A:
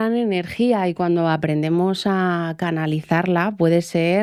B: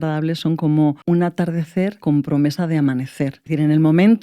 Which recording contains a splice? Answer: B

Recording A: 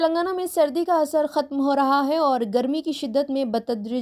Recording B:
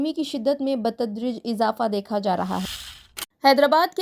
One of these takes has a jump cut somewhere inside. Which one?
B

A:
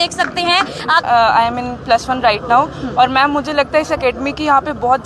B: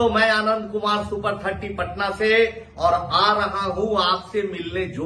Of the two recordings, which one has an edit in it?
A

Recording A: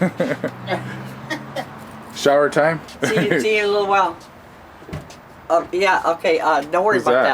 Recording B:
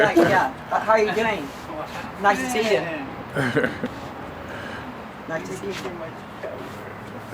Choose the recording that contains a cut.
A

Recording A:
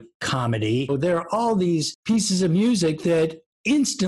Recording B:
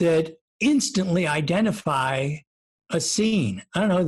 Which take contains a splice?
A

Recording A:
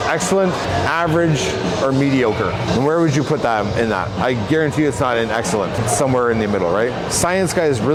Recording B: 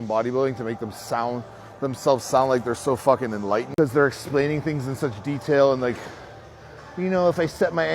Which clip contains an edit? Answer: B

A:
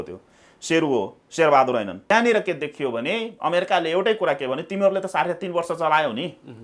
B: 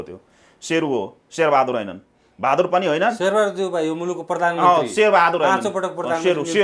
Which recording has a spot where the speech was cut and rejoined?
A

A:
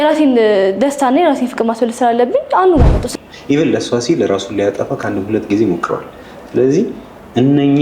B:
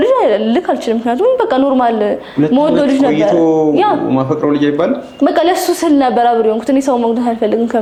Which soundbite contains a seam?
A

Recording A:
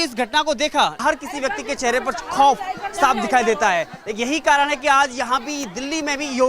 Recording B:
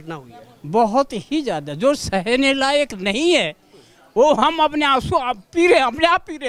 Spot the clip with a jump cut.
A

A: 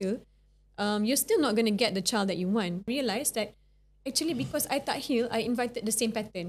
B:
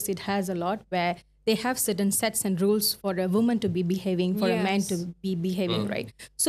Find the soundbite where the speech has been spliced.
A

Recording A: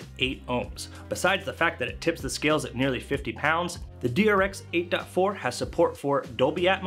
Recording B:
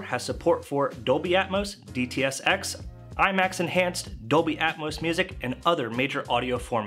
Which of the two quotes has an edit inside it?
A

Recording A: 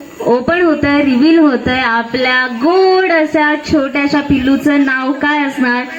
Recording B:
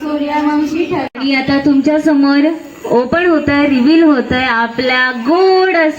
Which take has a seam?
B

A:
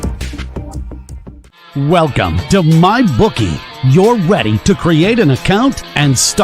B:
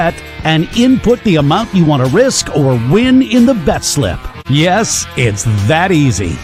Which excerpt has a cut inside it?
A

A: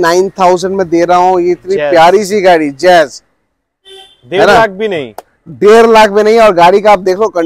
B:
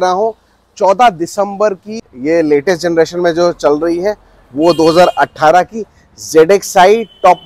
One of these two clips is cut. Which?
B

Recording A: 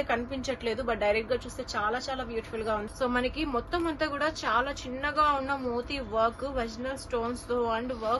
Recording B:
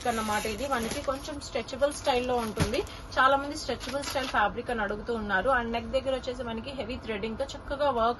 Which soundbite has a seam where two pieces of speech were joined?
A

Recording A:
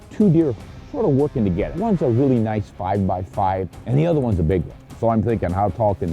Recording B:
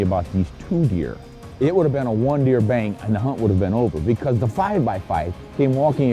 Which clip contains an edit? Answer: A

